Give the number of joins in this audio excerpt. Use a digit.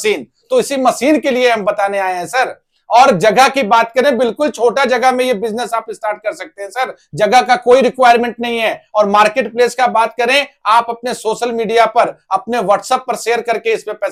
0